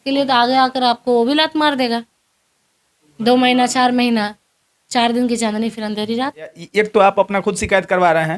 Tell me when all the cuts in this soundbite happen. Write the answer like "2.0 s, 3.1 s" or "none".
6.6 s

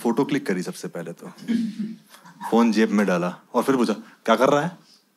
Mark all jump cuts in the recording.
none

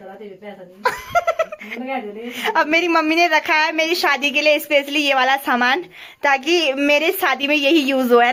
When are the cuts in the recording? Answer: none

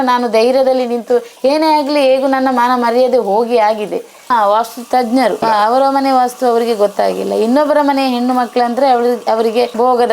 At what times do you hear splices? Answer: 4.2 s

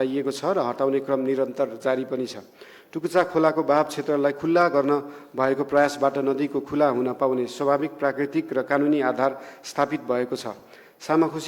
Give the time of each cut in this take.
none

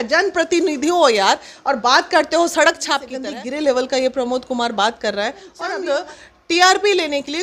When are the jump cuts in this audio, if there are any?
3.1 s, 5.7 s

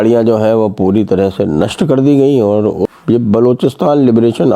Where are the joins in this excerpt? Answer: 2.9 s

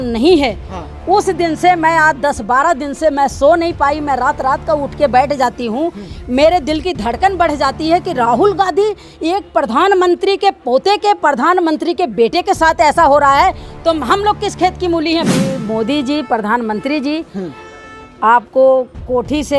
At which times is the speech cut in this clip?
15.3 s

